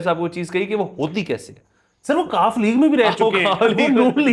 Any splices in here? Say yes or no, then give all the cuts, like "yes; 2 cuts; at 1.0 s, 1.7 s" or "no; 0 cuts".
no; 0 cuts